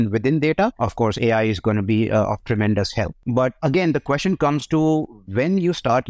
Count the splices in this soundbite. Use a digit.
1